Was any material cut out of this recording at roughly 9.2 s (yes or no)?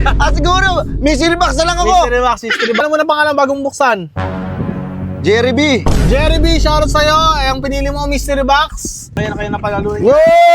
yes